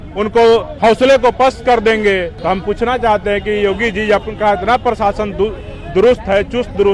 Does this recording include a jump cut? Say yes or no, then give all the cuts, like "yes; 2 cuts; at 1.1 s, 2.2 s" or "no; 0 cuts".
yes; 1 cut; at 2.3 s